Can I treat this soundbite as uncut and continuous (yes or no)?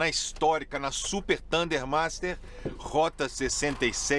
yes